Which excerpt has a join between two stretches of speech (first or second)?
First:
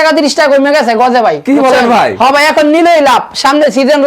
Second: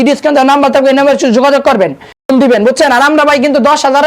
second